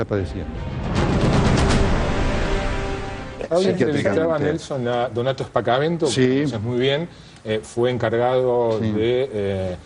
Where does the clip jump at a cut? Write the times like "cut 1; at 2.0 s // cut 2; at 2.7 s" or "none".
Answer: cut 1; at 3.3 s